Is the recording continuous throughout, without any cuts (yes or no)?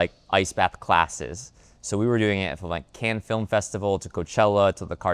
yes